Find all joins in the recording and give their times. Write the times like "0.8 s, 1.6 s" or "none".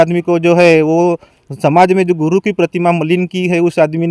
none